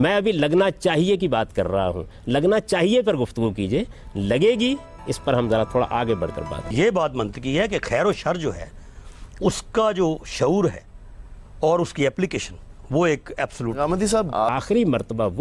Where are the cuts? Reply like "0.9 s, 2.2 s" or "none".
6.6 s, 14.4 s